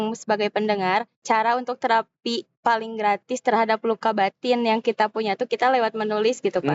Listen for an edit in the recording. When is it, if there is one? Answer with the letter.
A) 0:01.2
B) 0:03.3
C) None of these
A